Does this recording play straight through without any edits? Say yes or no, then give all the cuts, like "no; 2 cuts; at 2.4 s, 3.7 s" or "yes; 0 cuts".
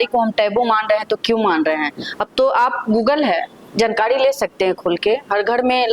yes; 0 cuts